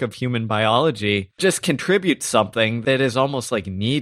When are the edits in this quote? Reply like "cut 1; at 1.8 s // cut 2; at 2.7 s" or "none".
cut 1; at 1.4 s // cut 2; at 2.8 s